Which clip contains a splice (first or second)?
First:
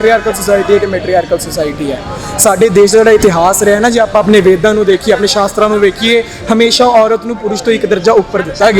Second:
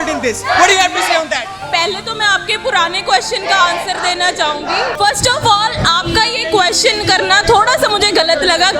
second